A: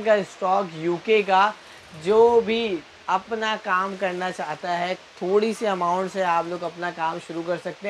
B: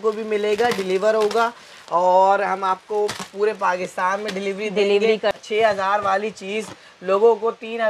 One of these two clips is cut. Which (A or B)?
B